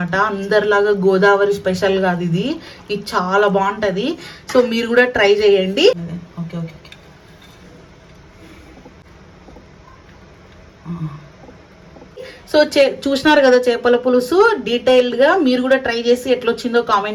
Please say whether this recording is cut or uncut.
uncut